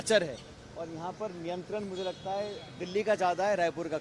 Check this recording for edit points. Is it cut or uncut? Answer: uncut